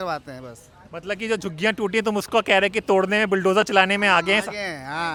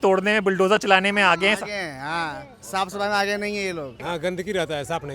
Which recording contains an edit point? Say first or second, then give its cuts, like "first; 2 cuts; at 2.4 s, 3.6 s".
second; 1 cut; at 4.0 s